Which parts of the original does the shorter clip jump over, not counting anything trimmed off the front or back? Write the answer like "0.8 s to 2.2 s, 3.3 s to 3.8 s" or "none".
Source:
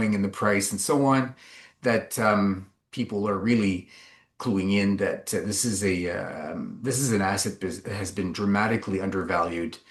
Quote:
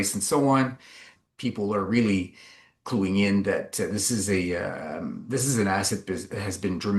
1.7 s to 2.7 s